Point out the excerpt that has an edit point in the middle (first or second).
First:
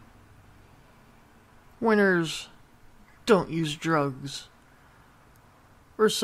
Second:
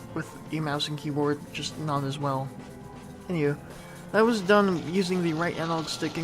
second